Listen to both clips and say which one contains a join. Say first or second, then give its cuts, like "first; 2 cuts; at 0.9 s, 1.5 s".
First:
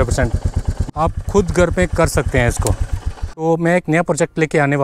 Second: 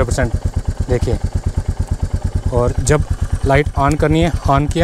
first; 2 cuts; at 0.8 s, 3.2 s